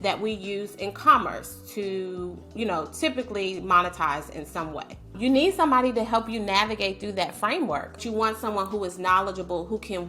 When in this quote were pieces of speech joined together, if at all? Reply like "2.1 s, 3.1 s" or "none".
5.1 s, 8.0 s

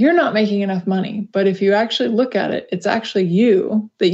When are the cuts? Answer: none

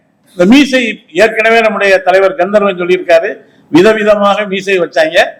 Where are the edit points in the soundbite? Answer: none

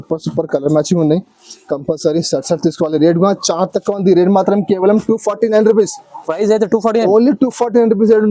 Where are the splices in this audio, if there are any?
none

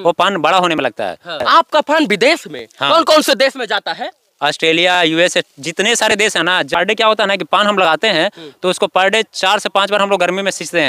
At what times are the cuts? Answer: 1.4 s, 6.7 s

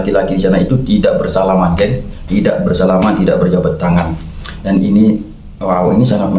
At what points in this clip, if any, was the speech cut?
none

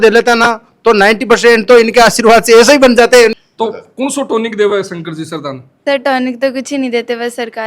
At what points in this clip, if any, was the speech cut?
3.4 s

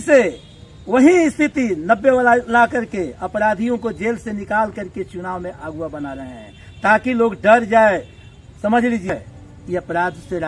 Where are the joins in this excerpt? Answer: 9.1 s

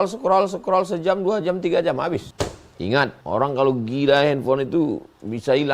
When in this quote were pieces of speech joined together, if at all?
2.3 s, 3.2 s

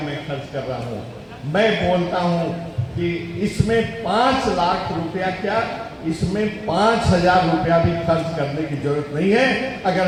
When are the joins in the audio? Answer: none

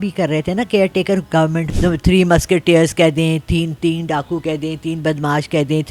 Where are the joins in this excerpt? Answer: 1.6 s

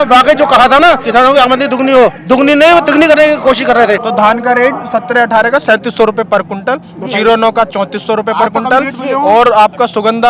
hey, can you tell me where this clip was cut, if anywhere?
1.0 s, 2.2 s, 4.0 s

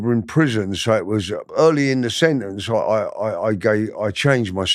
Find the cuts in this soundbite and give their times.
1.4 s

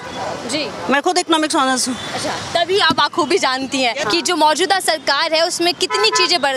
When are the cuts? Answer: 4.0 s

